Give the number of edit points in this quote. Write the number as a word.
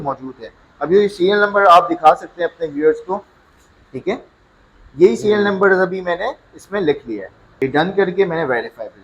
one